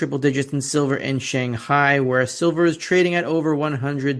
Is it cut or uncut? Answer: uncut